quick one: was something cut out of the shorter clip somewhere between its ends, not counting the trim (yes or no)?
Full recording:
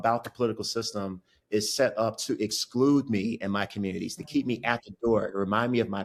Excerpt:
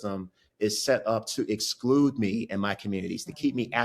no